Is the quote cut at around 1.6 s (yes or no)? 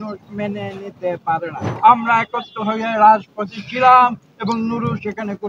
yes